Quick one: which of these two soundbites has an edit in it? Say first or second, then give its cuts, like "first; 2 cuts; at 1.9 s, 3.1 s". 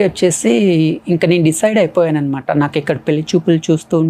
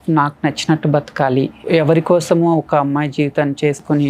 second; 1 cut; at 1.6 s